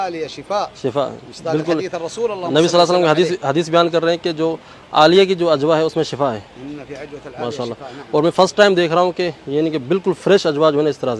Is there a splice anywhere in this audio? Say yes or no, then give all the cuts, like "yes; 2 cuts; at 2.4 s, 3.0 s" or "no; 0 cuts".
no; 0 cuts